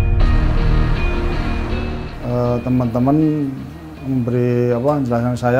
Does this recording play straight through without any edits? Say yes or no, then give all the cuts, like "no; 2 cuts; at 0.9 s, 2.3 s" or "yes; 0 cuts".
no; 1 cut; at 2.2 s